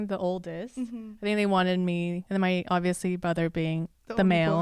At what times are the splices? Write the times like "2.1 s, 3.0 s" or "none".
2.2 s